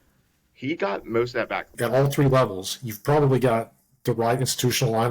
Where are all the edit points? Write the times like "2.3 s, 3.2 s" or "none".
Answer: 1.7 s